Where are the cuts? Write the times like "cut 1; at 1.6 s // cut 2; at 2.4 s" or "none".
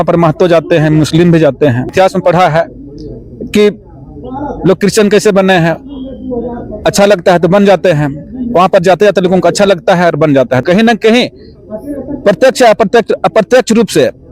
cut 1; at 1.9 s // cut 2; at 10.6 s